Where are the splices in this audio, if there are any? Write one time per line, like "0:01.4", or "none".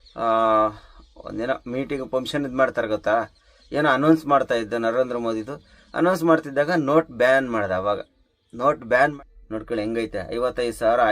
0:09.1